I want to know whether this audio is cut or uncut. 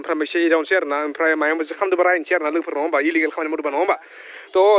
uncut